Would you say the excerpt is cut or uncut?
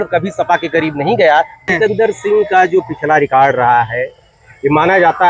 cut